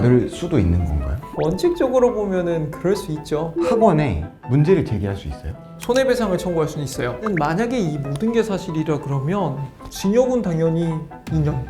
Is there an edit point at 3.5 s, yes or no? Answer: yes